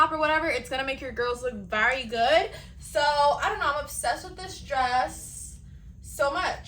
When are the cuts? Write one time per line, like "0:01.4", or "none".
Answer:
none